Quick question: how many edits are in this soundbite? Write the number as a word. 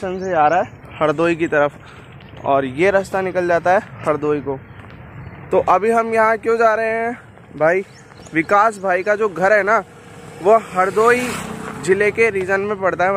zero